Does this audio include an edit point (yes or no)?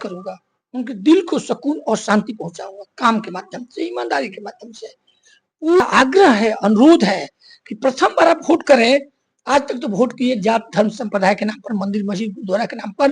yes